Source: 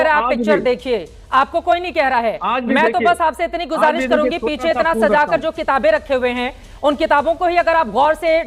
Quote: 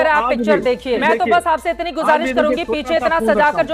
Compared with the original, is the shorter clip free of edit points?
no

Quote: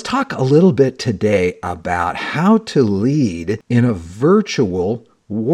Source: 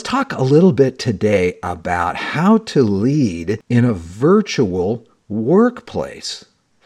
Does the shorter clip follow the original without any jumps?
yes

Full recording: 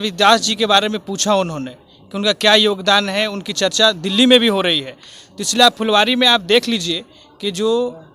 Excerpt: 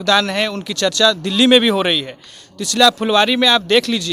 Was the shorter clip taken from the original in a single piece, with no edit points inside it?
yes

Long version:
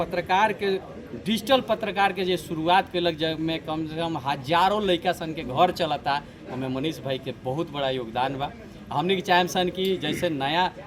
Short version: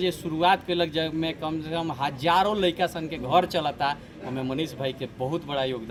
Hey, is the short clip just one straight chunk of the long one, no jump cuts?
yes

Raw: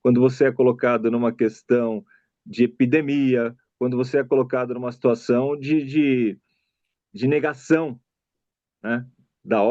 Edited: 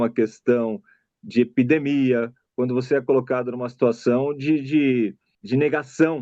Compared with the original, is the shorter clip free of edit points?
no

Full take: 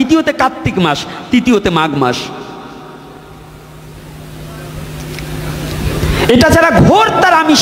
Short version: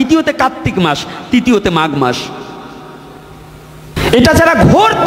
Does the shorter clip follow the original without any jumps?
no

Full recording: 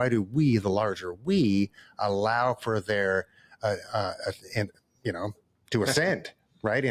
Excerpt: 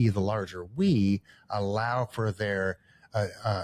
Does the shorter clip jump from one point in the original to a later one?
no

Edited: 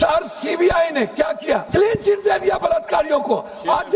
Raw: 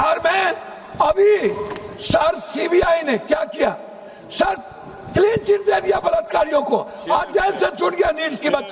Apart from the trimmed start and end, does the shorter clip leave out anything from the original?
yes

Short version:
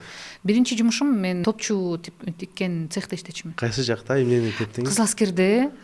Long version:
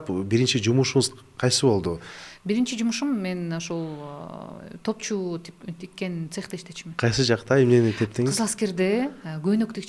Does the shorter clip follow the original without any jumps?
no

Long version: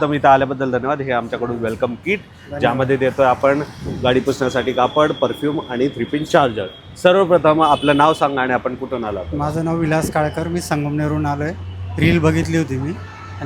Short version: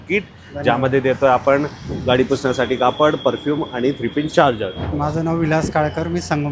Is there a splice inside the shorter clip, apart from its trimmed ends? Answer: yes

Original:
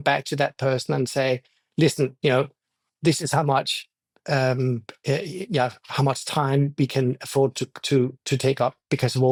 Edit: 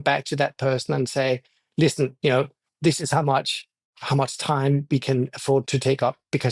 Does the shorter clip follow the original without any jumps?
no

